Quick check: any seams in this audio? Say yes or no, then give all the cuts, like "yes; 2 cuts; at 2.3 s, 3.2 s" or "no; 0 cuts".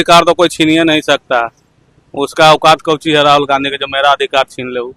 no; 0 cuts